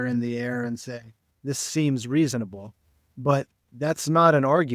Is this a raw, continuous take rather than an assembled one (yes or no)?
no